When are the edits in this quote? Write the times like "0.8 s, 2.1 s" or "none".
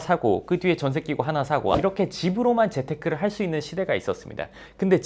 1.8 s